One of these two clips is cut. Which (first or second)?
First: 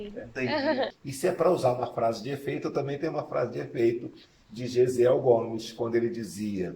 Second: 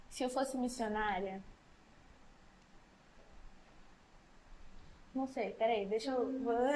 first